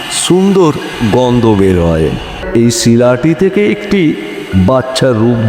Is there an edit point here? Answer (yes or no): yes